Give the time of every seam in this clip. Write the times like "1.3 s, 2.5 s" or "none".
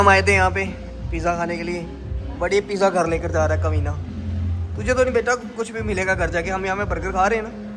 none